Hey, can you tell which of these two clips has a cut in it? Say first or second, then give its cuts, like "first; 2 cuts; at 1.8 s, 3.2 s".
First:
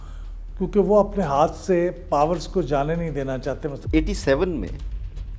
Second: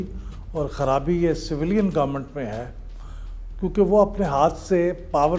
first; 1 cut; at 3.8 s